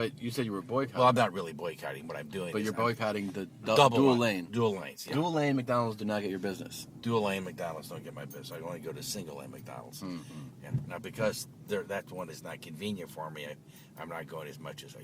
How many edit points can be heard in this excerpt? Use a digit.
1